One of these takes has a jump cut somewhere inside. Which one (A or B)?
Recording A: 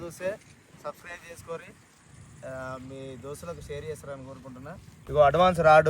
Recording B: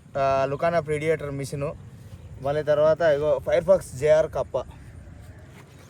A